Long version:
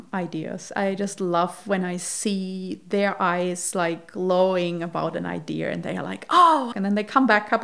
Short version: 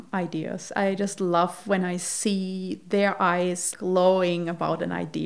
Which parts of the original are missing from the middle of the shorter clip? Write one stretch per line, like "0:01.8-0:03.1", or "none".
0:03.7-0:04.0